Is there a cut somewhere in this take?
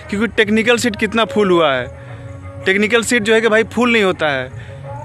no; 0 cuts

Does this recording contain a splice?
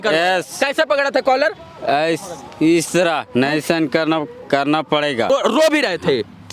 yes; 1 cut; at 5.3 s

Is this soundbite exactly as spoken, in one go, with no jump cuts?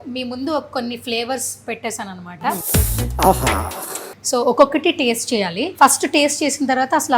no; 3 cuts; at 2.6 s, 4.1 s, 5.6 s

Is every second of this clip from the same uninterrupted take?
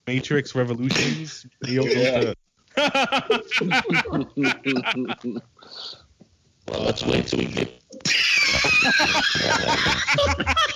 no; 1 cut; at 2.4 s

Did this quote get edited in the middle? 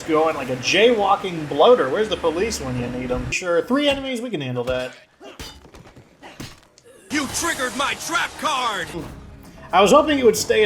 yes; 2 cuts; at 3.3 s, 9.0 s

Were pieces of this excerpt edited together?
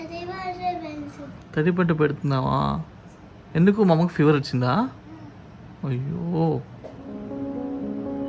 no; 0 cuts

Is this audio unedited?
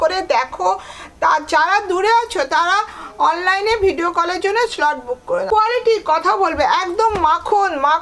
no; 1 cut; at 5.5 s

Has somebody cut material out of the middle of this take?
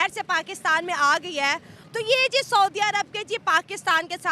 yes; 1 cut; at 1.8 s

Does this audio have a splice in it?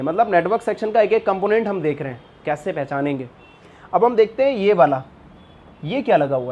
no; 0 cuts

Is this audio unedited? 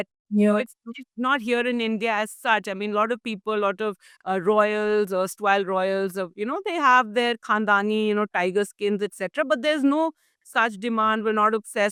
yes; 0 cuts

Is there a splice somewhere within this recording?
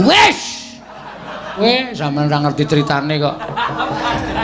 yes; 1 cut; at 1.6 s

